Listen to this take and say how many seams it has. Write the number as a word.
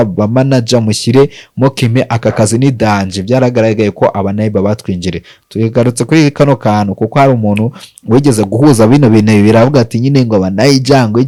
zero